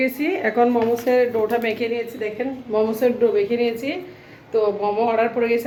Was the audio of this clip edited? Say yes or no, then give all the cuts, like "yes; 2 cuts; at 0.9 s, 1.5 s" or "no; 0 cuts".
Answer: no; 0 cuts